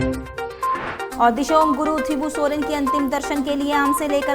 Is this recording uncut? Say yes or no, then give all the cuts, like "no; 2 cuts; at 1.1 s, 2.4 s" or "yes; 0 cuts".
no; 1 cut; at 1.1 s